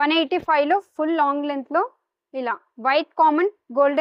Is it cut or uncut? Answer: uncut